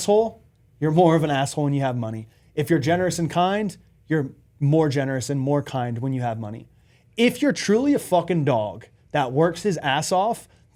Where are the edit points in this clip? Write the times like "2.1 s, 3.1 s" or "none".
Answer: none